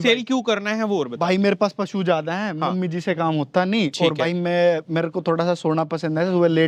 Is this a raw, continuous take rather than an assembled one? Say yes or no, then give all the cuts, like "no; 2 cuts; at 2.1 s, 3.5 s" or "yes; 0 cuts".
yes; 0 cuts